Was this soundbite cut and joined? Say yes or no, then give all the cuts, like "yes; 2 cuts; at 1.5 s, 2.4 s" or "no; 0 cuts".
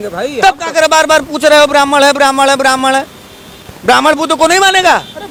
no; 0 cuts